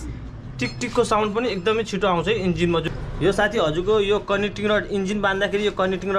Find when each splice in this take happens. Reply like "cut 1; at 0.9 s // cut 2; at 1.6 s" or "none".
cut 1; at 2.8 s